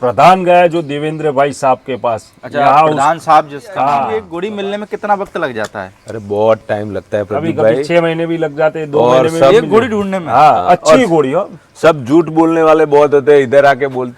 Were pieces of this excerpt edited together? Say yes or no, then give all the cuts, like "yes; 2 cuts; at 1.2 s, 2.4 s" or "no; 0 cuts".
yes; 1 cut; at 4.3 s